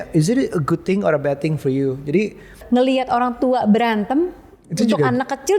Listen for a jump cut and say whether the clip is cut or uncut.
cut